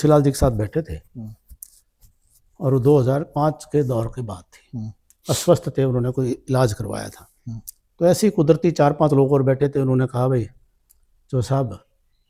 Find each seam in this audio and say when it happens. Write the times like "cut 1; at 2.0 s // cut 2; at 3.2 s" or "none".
none